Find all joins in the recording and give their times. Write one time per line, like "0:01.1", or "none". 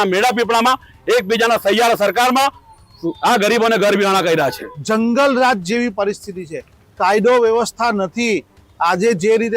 0:04.7